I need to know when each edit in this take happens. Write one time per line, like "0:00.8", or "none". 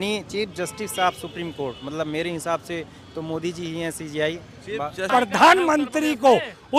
0:05.0